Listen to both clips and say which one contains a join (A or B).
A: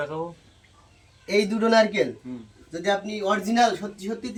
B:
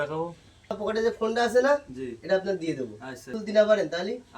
B